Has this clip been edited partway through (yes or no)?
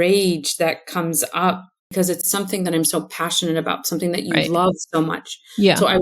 yes